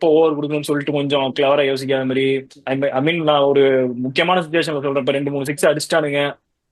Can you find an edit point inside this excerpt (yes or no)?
no